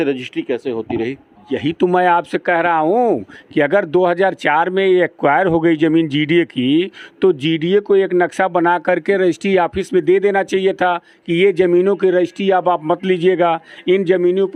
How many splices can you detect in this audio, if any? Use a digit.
0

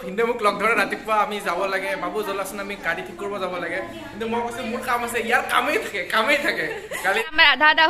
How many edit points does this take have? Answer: 1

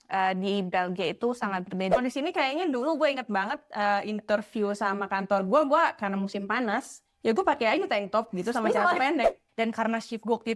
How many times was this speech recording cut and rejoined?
2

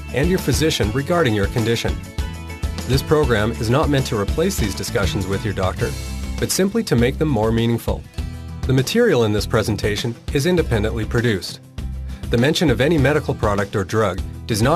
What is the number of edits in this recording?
1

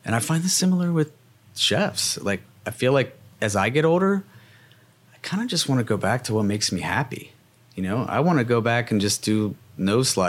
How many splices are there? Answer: 0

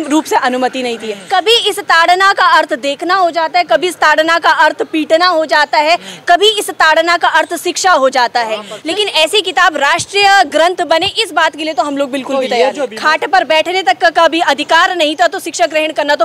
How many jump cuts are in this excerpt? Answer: 3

